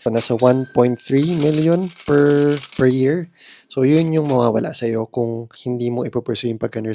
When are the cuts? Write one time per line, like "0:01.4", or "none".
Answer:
0:05.5